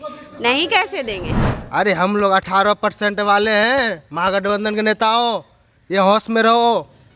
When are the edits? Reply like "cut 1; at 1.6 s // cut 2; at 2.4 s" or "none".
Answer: cut 1; at 1.3 s

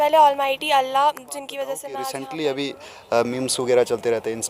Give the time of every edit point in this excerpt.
cut 1; at 1.9 s

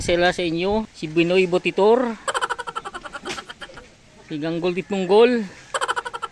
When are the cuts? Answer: cut 1; at 1.0 s

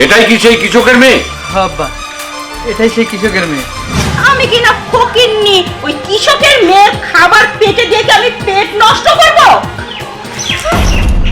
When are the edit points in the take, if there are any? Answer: cut 1; at 4.0 s // cut 2; at 9.8 s

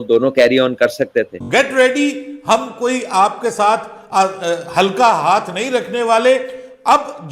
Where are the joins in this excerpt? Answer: cut 1; at 1.4 s

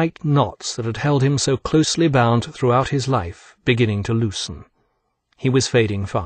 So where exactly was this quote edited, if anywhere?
cut 1; at 2.4 s

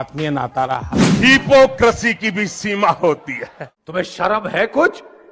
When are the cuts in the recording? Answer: cut 1; at 1.0 s

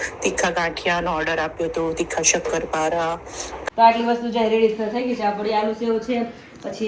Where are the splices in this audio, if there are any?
cut 1; at 3.5 s

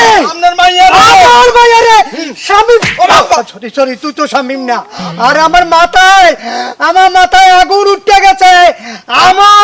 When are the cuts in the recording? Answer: none

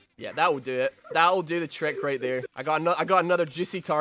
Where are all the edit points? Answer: cut 1; at 2.5 s

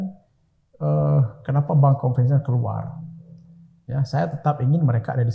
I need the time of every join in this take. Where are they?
none

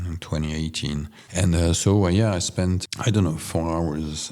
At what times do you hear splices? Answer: cut 1; at 1.2 s

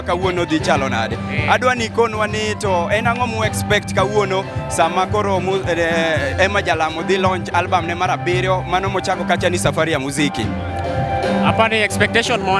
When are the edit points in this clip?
none

